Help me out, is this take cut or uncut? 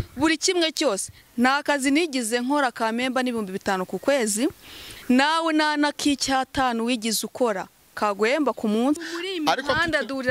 cut